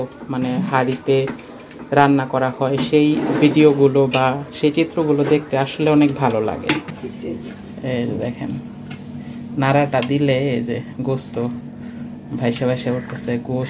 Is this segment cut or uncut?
cut